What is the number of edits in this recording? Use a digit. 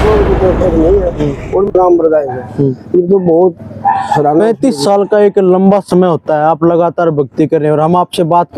1